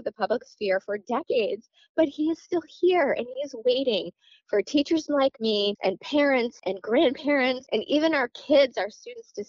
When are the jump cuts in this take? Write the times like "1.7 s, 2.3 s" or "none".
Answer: 5.8 s, 6.6 s, 7.6 s